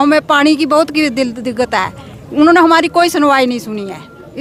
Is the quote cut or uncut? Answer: uncut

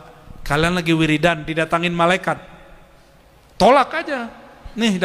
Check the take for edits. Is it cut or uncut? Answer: uncut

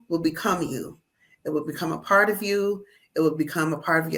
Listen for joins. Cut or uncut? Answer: uncut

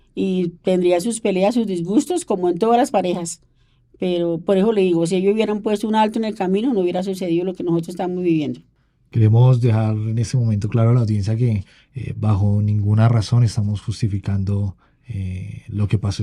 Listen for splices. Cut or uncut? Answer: uncut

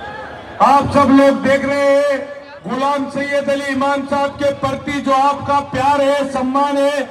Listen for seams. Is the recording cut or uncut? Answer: uncut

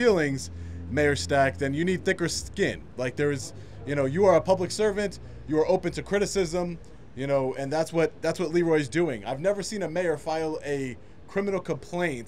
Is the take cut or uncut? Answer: uncut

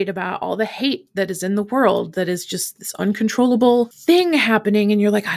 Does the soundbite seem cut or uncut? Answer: uncut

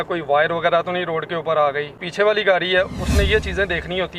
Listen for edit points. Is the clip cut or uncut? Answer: cut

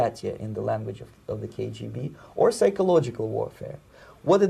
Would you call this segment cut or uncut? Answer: uncut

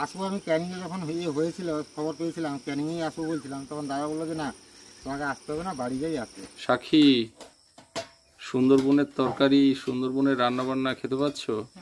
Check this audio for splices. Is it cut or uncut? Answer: cut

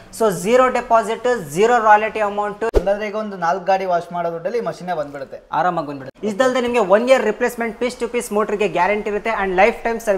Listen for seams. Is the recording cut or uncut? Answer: cut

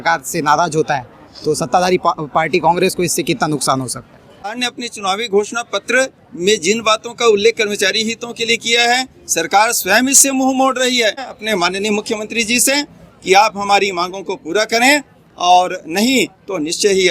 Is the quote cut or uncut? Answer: cut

